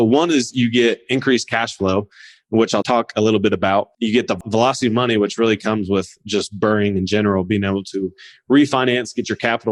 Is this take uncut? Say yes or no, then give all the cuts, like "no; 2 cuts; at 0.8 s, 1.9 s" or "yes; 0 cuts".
no; 2 cuts; at 2.8 s, 4.4 s